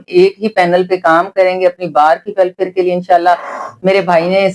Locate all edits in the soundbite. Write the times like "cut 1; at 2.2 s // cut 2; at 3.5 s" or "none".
none